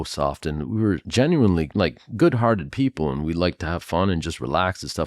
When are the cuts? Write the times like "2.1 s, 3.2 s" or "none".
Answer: 1.1 s, 1.7 s